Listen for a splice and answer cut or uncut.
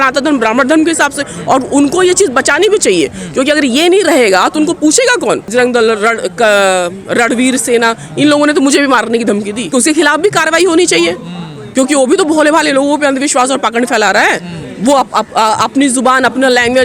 cut